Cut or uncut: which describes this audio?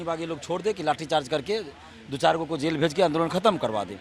uncut